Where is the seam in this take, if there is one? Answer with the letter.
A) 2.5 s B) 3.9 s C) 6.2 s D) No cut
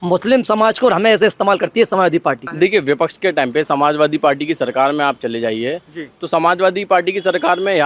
A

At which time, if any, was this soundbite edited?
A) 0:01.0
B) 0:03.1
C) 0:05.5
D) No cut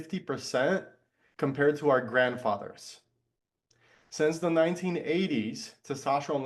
D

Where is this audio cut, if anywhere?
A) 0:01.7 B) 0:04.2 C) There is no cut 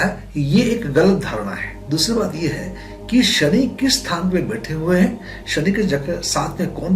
A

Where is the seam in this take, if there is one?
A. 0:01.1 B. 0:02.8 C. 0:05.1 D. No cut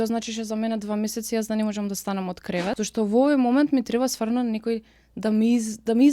B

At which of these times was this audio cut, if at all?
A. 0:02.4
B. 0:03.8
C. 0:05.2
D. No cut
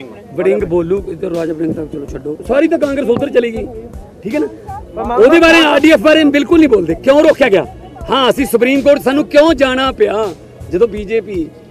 A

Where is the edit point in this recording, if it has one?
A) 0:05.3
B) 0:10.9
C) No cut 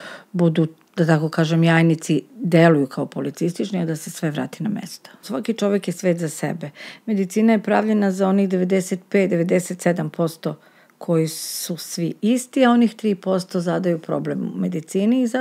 A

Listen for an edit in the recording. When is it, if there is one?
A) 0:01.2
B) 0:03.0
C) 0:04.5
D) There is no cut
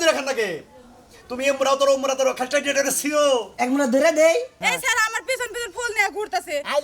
C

